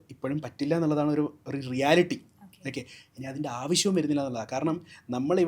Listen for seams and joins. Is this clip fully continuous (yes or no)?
yes